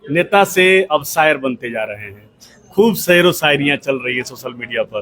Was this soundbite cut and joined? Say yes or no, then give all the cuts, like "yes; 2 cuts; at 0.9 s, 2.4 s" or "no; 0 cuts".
no; 0 cuts